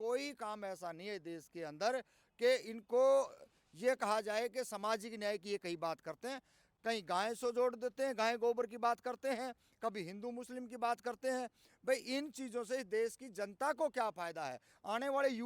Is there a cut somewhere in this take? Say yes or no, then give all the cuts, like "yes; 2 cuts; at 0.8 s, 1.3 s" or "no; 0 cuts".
yes; 1 cut; at 6.7 s